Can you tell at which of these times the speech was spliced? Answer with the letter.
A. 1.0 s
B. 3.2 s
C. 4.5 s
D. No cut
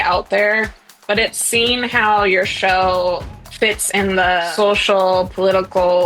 C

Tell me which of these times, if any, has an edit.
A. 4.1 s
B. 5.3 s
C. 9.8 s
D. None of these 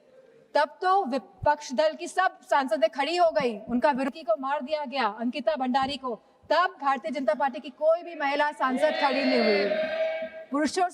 A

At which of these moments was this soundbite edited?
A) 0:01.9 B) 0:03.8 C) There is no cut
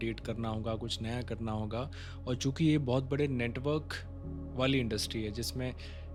C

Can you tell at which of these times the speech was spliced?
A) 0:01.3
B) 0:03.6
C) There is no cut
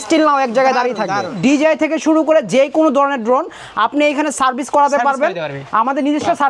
A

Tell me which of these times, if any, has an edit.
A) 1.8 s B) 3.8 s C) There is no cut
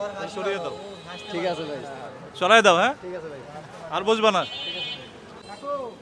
C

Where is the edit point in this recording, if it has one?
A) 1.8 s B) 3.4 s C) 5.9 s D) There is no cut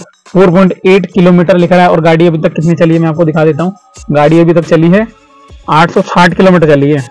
D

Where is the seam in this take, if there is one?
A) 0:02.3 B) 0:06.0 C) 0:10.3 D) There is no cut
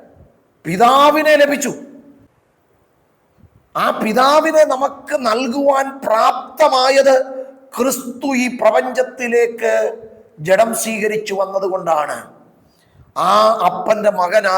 A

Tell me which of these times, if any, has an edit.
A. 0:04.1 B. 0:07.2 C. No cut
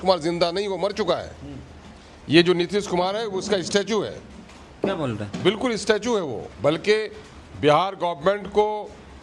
C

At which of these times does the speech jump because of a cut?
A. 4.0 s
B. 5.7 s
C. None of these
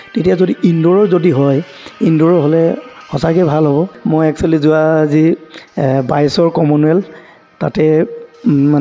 A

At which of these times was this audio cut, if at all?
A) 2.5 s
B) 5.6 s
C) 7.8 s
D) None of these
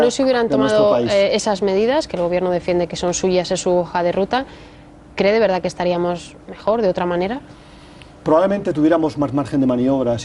D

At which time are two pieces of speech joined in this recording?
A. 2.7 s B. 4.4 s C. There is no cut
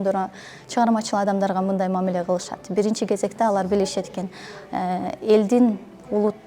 C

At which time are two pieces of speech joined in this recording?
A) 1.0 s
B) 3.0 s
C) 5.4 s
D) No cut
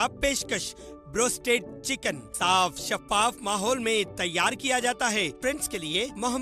C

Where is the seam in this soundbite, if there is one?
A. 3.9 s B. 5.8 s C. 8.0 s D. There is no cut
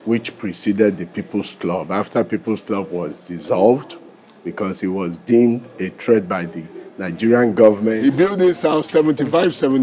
C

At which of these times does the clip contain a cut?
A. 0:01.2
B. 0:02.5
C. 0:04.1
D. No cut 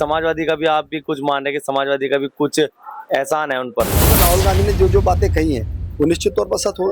C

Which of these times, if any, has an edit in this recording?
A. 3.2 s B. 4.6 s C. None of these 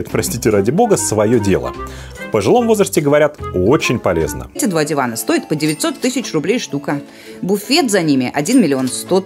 B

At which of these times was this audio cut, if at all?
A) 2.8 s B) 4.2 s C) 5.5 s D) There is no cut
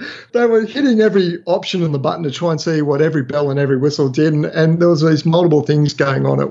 D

